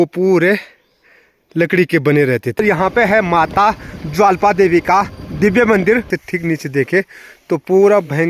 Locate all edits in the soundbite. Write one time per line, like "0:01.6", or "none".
0:02.6
0:06.1